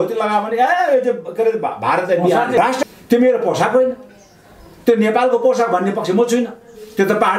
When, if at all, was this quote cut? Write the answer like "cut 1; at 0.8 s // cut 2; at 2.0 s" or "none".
cut 1; at 2.6 s